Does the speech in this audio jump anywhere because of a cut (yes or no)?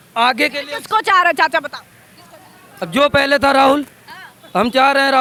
no